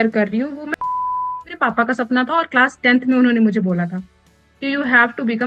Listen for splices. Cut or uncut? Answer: cut